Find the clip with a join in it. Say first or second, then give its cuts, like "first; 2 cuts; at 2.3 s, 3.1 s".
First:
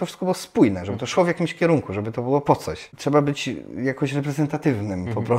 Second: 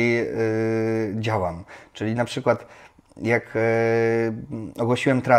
first; 1 cut; at 2.9 s